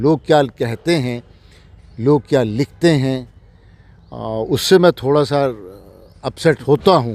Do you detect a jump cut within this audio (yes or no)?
no